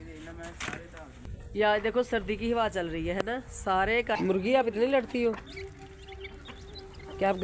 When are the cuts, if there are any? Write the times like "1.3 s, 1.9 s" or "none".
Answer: 1.3 s, 4.2 s